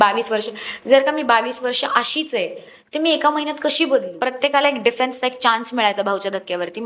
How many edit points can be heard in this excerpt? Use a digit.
1